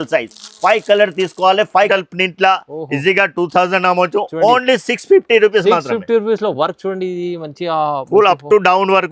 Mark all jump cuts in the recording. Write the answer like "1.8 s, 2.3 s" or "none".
1.9 s